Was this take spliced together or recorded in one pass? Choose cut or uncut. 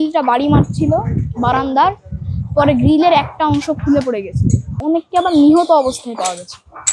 cut